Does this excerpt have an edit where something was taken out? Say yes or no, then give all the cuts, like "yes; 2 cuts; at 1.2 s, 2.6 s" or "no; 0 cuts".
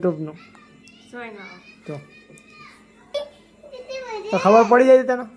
yes; 1 cut; at 3.1 s